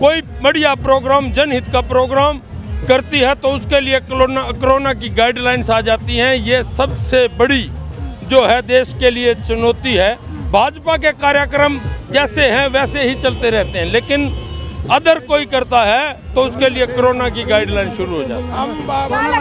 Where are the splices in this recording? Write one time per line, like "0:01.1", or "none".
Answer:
none